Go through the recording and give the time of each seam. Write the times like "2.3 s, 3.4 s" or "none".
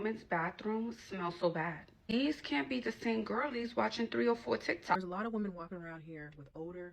5.0 s